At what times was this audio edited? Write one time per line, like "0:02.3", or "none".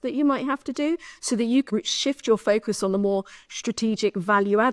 0:01.7